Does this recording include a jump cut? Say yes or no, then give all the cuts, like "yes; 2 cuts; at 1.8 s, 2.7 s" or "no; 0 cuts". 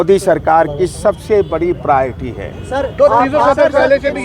no; 0 cuts